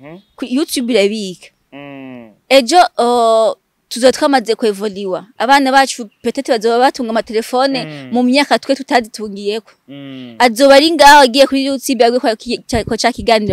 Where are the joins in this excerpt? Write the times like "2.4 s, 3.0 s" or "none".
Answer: none